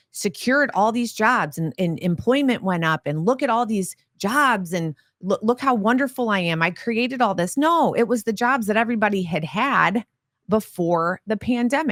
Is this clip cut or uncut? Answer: uncut